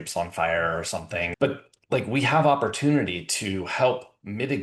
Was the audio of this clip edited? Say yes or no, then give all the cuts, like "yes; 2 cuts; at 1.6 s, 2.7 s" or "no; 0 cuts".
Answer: yes; 1 cut; at 1.3 s